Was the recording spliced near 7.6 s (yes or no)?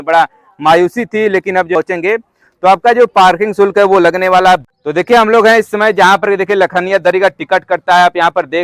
no